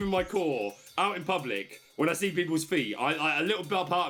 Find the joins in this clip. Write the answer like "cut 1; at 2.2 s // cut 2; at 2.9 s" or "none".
none